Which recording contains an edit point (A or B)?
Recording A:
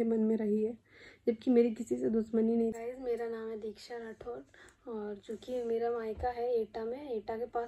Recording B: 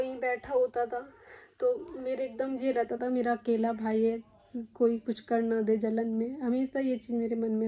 A